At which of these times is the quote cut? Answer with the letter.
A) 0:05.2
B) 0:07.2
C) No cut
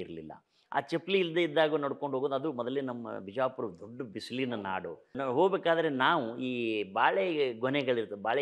A